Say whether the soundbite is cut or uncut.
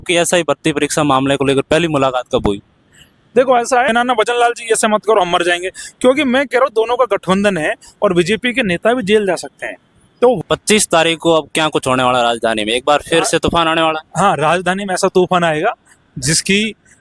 cut